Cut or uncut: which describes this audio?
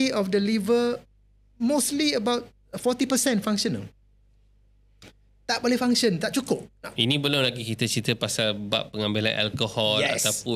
uncut